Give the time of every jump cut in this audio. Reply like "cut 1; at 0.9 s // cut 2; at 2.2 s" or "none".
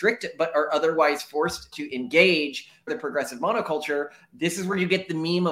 cut 1; at 1.8 s // cut 2; at 2.9 s